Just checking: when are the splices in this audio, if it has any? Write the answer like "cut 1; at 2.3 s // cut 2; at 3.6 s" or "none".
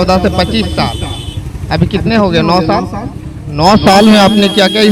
none